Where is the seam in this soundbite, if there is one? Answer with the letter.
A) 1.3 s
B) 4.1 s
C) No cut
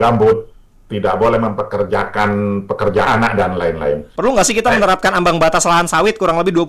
B